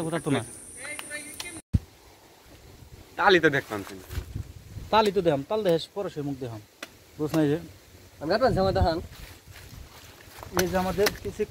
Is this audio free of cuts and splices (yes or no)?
yes